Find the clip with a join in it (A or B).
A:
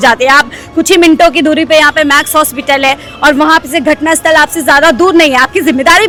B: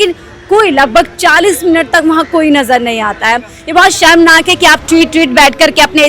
B